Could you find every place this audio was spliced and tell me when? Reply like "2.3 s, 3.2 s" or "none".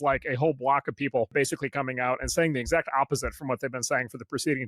1.3 s

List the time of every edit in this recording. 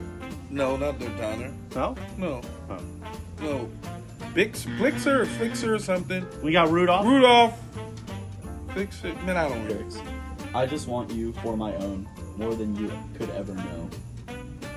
9.7 s

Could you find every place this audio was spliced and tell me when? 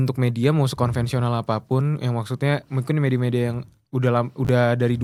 none

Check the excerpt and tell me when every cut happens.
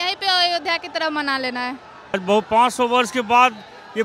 2.2 s

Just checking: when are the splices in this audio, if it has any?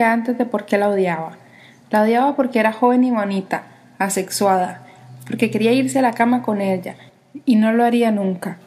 none

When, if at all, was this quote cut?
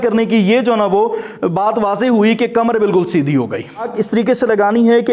3.9 s

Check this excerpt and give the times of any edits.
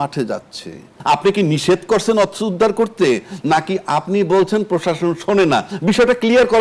1.0 s

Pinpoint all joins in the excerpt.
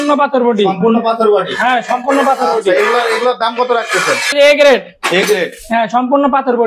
4.3 s

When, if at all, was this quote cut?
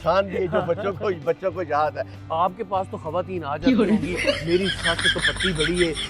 2.1 s

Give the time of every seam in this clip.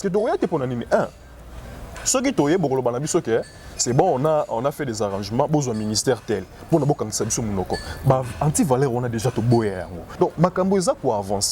10.0 s

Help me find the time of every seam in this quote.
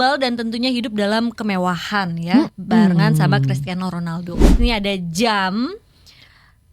4.5 s

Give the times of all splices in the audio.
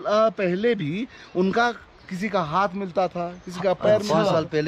none

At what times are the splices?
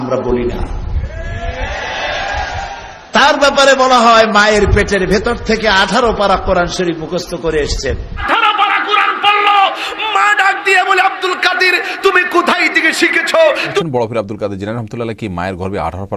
8.1 s, 13.8 s

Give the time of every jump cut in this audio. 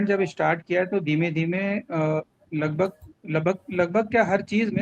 none

